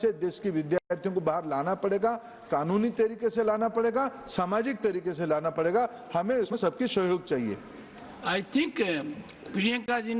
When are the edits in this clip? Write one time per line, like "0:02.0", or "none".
none